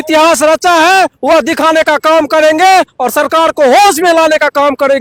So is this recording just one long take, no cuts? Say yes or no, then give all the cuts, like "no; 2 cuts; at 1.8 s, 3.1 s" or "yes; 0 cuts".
yes; 0 cuts